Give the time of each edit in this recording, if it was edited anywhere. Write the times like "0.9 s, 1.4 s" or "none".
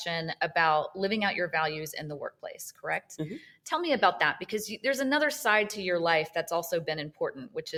none